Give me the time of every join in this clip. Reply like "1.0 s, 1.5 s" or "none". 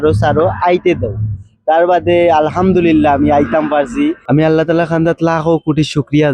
4.2 s

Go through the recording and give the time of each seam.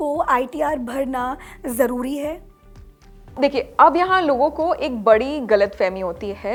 none

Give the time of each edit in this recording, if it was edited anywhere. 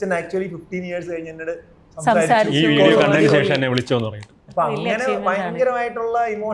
none

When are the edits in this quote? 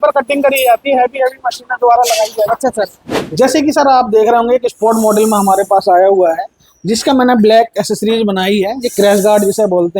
3.1 s

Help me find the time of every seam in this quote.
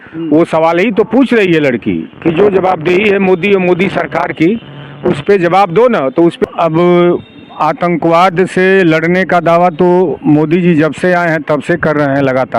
6.4 s

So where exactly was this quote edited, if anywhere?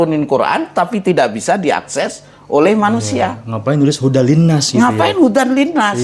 none

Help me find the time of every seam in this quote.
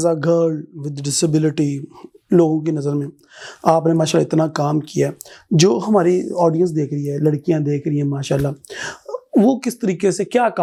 none

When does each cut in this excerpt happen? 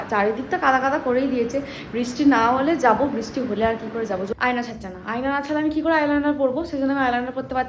4.3 s

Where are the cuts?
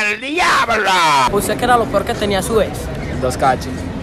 1.3 s

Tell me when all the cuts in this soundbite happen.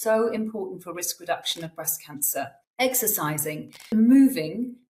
2.6 s, 3.9 s

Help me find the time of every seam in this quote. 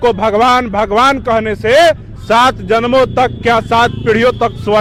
none

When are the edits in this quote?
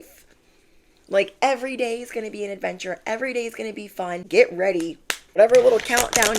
4.2 s, 5.4 s

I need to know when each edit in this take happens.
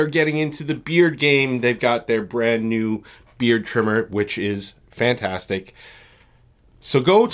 none

